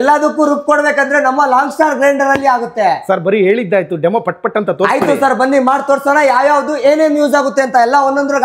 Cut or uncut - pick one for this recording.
uncut